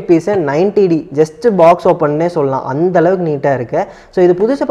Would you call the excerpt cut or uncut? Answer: uncut